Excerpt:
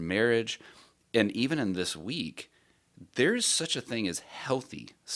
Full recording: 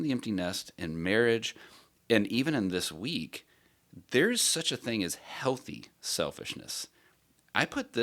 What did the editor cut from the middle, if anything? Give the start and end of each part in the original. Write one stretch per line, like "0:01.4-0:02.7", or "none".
none

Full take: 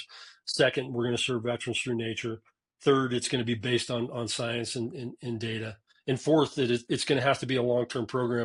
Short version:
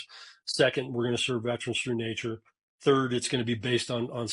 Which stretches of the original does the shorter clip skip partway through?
none

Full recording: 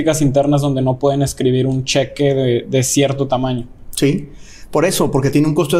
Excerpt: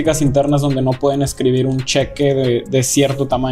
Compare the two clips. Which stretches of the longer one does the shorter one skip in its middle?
none

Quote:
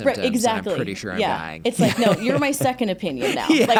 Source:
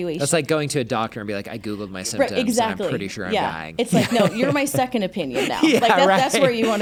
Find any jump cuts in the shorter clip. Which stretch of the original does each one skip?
none

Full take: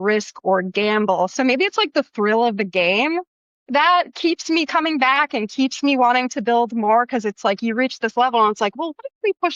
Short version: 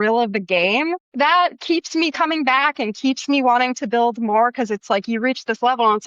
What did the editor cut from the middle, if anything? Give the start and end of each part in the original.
0:03.3-0:03.6

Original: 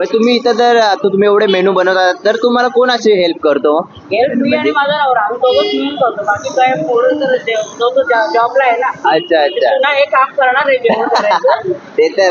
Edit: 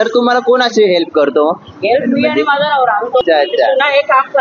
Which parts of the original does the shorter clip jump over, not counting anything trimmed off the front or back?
0:05.5-0:09.3

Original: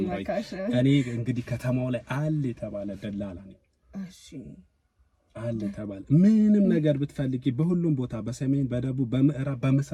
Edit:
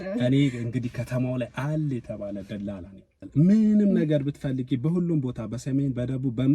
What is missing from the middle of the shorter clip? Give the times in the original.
0:03.8-0:06.0

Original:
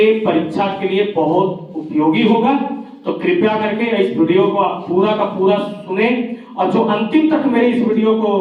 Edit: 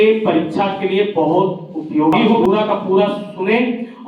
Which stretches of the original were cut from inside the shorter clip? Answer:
0:02.4-0:04.9

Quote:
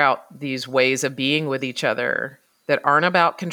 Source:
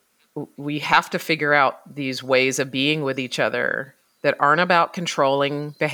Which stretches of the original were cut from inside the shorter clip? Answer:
none

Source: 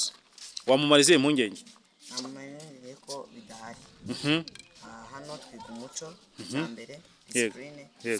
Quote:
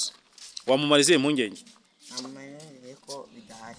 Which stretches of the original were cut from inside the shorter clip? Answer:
none

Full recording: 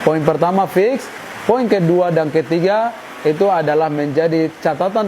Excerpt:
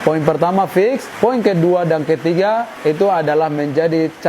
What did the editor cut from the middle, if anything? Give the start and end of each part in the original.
0:01.1-0:01.3
0:03.0-0:03.1

